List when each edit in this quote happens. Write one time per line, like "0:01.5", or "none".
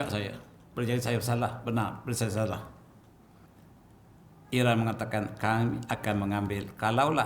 0:03.5

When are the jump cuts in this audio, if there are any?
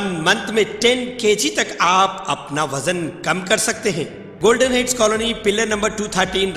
0:04.2

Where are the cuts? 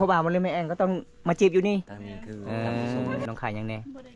0:03.3

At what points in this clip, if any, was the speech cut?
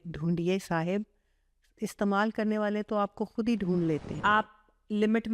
0:04.1

